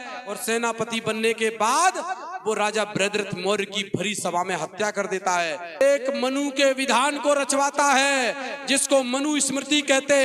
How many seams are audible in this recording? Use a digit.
1